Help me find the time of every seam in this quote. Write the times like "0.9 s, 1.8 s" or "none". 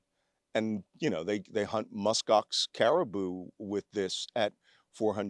none